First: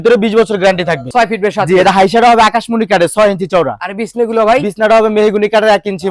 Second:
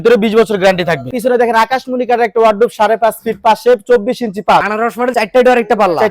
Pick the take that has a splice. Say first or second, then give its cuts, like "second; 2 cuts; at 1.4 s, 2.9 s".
second; 2 cuts; at 1.1 s, 5.1 s